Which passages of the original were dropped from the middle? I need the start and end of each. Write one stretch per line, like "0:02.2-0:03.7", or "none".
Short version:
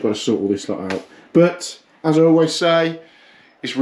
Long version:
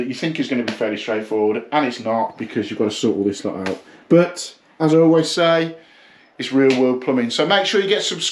none

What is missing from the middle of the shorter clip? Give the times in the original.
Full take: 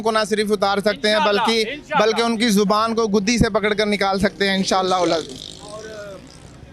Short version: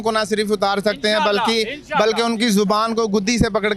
none

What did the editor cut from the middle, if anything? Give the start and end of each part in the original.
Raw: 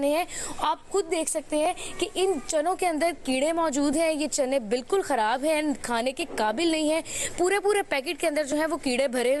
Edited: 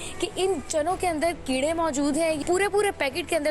0:04.2-0:07.3

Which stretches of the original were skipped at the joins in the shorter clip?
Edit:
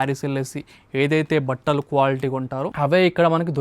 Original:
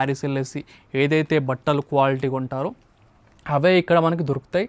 0:02.7-0:03.4

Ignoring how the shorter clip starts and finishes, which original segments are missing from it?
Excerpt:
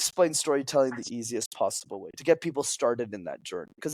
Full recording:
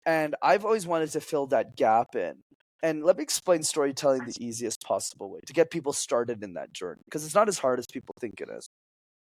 none

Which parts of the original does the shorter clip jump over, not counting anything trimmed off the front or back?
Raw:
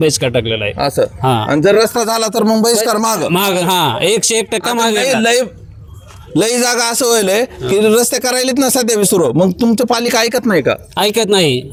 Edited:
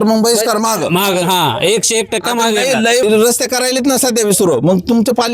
0:05.4-0:07.8

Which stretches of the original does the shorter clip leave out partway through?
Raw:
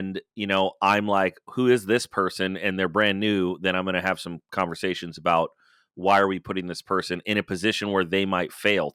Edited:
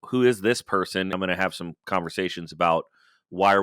0:02.6-0:03.8

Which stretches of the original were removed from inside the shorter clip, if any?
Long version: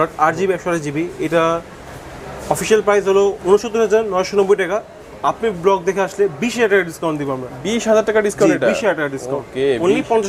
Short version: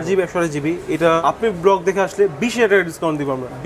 0:01.5-0:05.2

